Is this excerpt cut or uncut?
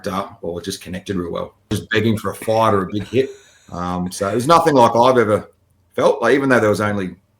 cut